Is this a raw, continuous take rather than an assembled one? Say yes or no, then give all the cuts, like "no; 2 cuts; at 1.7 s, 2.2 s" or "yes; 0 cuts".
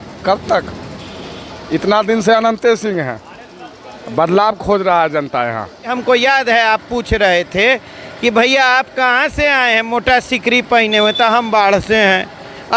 no; 1 cut; at 5.9 s